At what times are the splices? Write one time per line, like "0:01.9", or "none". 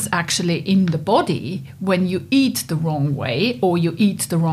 none